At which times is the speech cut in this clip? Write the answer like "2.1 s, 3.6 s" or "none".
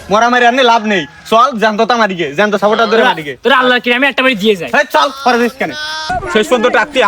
6.0 s